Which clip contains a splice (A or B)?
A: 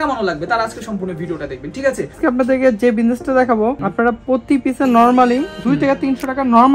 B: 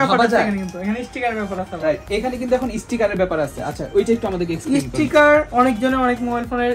A